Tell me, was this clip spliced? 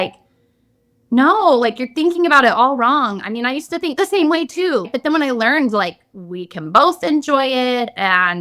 yes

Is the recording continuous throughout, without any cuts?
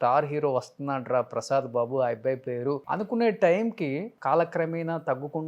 no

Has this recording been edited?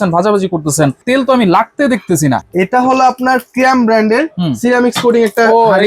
yes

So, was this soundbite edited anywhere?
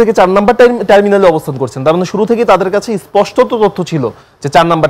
no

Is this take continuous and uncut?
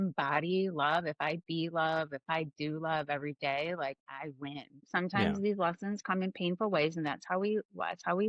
no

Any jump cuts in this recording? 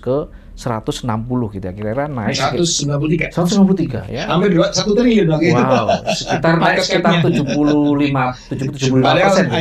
no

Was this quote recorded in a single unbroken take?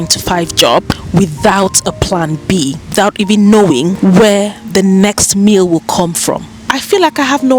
no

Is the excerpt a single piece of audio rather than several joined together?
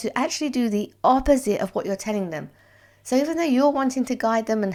yes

